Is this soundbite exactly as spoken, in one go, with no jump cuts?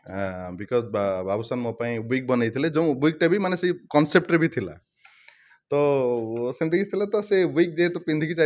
yes; 0 cuts

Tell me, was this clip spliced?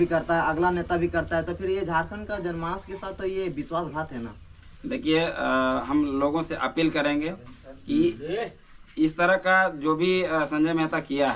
no; 0 cuts

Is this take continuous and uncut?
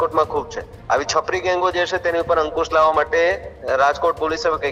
yes; 0 cuts

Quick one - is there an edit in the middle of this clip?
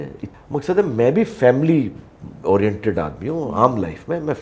no; 0 cuts

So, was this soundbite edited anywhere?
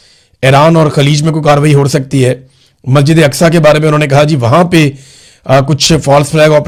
no; 0 cuts

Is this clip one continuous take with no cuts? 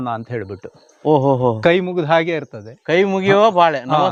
yes; 0 cuts

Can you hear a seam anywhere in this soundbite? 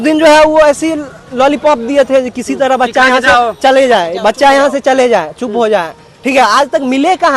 no; 0 cuts

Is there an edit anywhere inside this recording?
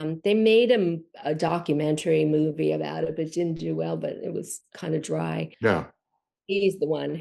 yes; 1 cut; at 5.5 s

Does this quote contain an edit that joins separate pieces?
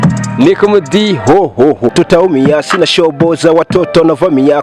yes; 1 cut; at 1.9 s

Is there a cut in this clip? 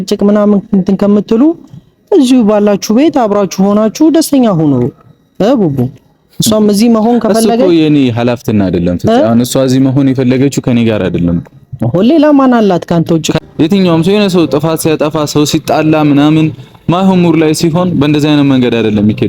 yes; 1 cut; at 13.3 s

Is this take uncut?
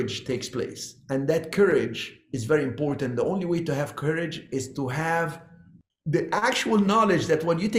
yes; 0 cuts

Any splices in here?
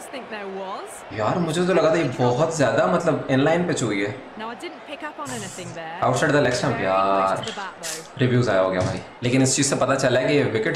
no; 0 cuts

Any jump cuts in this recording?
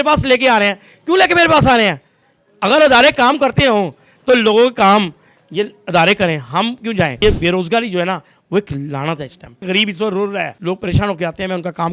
yes; 3 cuts; at 7.2 s, 9.6 s, 10.5 s

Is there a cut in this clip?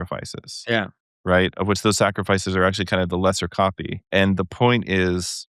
yes; 1 cut; at 4.1 s

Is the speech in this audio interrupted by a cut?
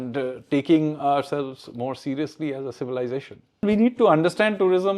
yes; 1 cut; at 3.6 s

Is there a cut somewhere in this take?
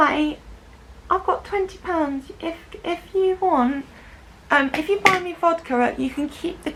no; 0 cuts

